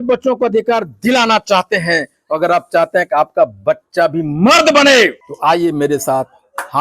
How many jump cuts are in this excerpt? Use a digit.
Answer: 1